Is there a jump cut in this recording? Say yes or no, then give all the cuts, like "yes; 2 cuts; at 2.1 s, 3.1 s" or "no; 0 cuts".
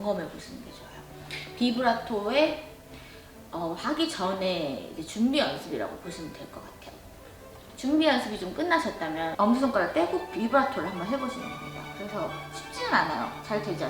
no; 0 cuts